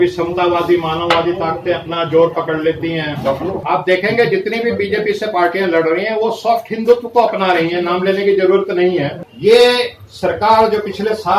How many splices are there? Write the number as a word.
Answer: two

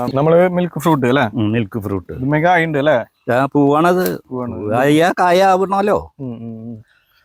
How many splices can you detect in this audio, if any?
zero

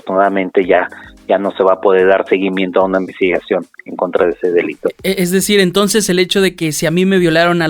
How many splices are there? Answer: zero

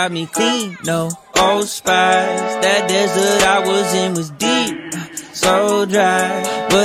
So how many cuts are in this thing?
zero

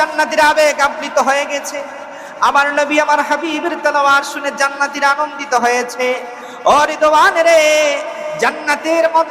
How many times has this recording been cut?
zero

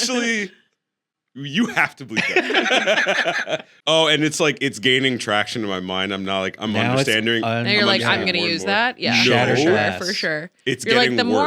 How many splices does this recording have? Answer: one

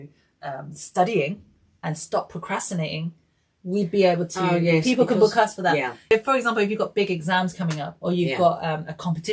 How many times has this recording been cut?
one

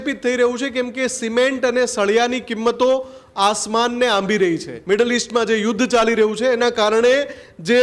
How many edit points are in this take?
one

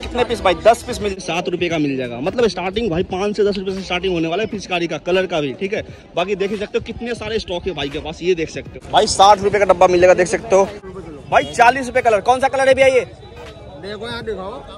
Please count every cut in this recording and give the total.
three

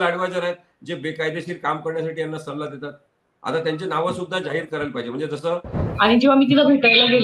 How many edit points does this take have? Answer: one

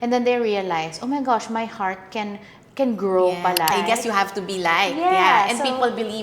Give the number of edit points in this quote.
one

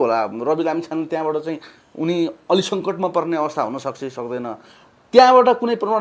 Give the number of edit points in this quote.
zero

